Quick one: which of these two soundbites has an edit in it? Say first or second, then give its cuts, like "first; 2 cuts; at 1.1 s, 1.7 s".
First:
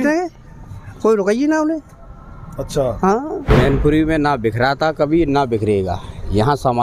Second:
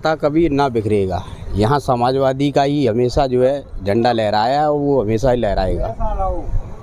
first; 1 cut; at 3.4 s